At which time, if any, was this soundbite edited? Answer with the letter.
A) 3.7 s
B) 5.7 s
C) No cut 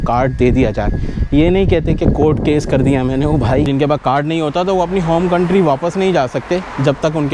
A